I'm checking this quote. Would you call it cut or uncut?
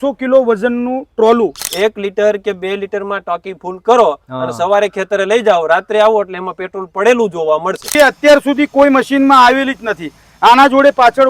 cut